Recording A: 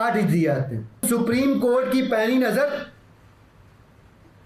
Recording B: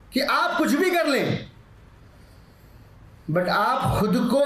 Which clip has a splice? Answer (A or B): A